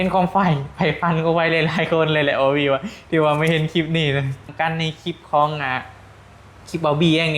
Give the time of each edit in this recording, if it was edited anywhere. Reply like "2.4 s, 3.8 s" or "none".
4.5 s